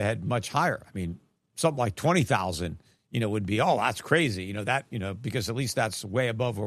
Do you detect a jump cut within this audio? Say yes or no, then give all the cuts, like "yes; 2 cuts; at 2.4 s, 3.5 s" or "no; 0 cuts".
no; 0 cuts